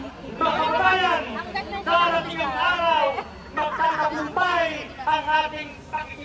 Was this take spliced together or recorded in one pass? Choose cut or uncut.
uncut